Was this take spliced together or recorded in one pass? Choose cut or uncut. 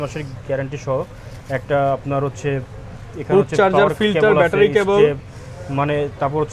uncut